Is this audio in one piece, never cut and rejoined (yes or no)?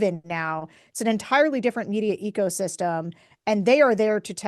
yes